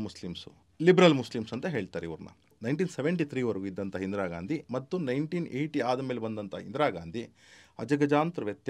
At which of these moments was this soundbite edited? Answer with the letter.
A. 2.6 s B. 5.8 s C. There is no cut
A